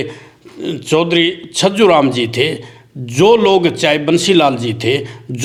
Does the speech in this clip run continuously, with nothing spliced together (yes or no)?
yes